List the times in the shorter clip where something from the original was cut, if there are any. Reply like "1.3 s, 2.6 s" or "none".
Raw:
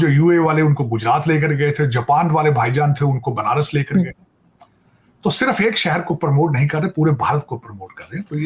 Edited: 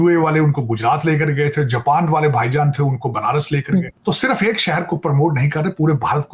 3.9 s